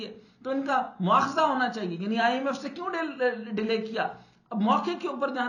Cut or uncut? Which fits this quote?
uncut